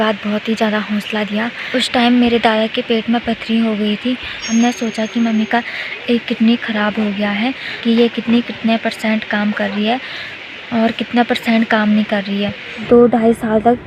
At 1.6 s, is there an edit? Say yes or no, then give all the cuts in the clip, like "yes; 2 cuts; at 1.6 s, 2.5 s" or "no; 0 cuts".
yes; 4 cuts; at 1.6 s, 4.4 s, 7.7 s, 12.8 s